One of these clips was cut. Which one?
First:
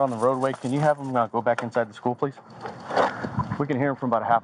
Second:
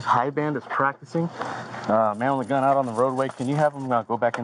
first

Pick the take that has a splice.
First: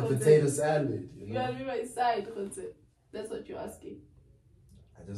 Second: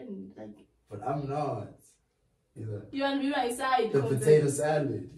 second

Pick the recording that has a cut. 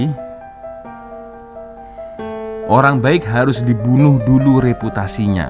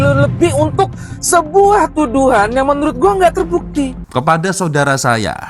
second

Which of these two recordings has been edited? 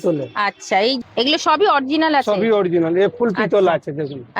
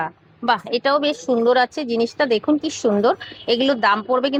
first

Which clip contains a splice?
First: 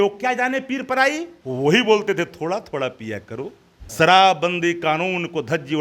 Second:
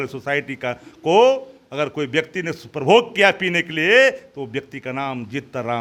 first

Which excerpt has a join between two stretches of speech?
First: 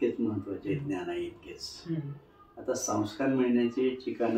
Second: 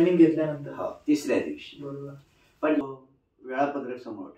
second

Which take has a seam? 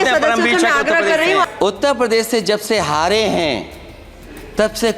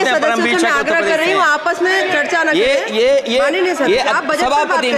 first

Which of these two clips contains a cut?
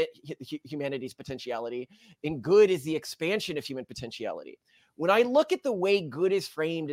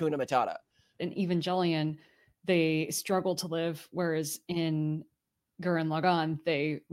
second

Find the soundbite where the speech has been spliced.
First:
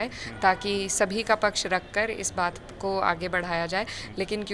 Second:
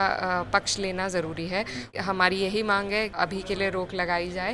second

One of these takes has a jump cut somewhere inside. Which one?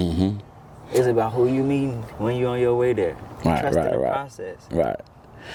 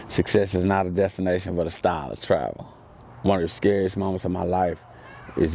second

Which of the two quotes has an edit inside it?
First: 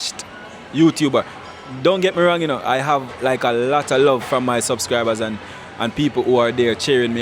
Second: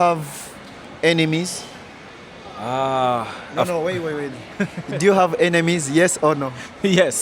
first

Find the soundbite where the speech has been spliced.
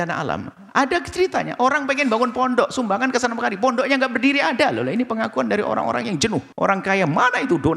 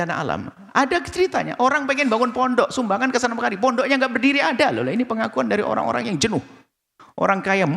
first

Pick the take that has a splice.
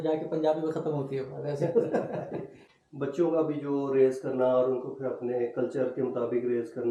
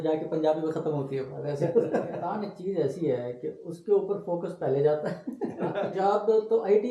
second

